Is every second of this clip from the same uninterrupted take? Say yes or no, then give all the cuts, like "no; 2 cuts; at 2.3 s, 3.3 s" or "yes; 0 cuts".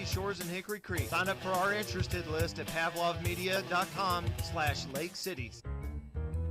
no; 1 cut; at 5.6 s